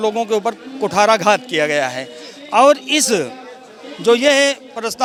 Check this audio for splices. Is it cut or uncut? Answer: uncut